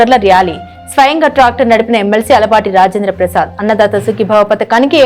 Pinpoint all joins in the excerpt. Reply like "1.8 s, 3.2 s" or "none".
none